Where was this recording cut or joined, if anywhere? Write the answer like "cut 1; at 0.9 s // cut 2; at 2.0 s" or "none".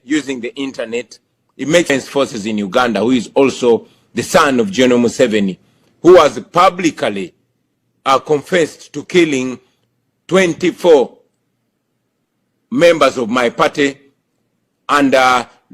cut 1; at 1.9 s